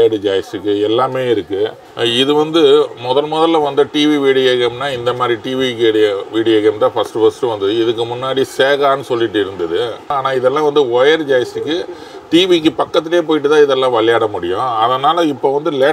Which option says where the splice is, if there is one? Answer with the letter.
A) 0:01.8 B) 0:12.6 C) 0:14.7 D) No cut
A